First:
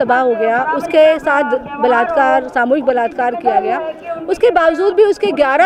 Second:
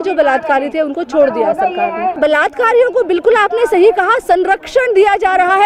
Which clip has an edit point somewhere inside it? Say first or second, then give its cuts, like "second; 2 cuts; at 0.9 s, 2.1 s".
second; 1 cut; at 2.2 s